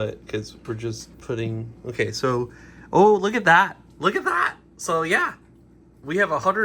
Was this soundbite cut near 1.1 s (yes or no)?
yes